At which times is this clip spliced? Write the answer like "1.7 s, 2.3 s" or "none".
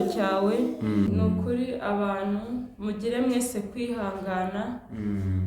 1.1 s